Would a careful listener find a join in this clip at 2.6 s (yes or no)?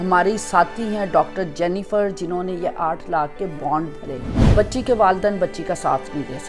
no